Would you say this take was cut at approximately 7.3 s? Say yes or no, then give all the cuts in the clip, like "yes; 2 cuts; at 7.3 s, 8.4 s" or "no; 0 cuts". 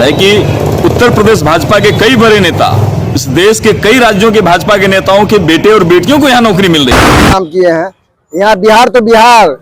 yes; 1 cut; at 7.3 s